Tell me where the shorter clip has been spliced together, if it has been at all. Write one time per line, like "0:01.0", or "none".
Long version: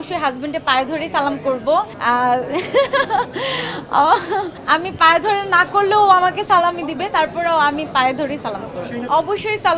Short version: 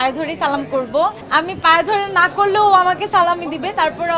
0:01.2